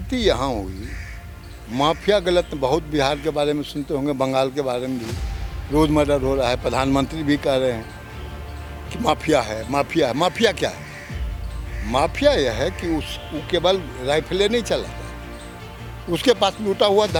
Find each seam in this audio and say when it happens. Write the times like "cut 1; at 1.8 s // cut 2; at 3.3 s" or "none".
none